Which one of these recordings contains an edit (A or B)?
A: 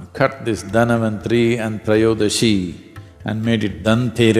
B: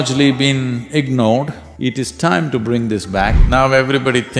B